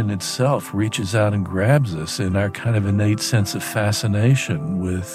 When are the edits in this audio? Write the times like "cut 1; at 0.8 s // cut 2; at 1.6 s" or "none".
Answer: cut 1; at 2.3 s